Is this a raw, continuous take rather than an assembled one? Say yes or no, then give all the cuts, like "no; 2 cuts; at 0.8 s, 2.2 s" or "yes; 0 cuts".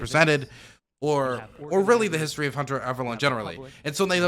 yes; 0 cuts